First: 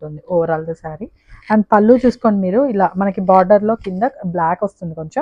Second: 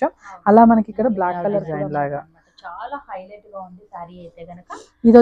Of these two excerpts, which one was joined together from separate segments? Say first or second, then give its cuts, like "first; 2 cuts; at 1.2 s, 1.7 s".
second; 1 cut; at 1.6 s